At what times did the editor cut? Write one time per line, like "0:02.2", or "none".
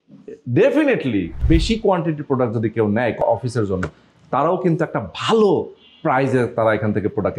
0:01.3